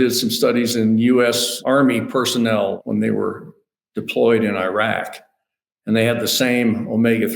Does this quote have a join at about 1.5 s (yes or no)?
yes